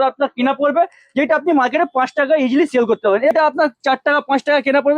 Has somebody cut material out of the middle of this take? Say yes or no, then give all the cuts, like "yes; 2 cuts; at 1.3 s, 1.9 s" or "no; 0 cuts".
yes; 1 cut; at 3.3 s